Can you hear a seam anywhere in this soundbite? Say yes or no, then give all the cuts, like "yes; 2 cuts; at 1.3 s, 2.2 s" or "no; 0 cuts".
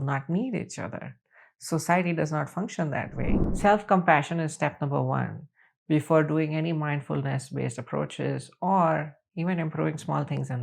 yes; 1 cut; at 3.3 s